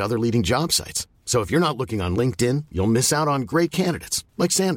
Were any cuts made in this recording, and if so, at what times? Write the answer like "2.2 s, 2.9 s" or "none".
none